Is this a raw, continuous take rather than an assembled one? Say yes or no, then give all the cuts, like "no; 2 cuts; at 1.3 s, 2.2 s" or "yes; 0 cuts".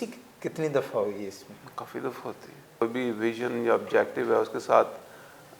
no; 1 cut; at 2.8 s